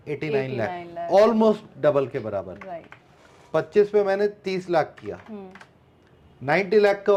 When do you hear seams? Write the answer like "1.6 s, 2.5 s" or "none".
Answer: none